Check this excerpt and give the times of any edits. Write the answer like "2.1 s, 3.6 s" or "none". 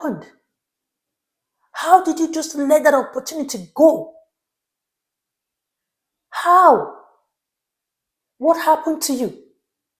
none